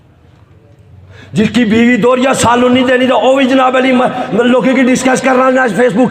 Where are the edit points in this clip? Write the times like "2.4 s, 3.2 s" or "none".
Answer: none